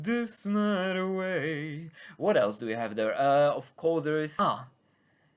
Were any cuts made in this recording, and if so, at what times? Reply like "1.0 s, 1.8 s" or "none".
none